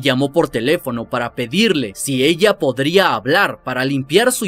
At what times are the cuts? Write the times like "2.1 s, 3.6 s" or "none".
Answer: none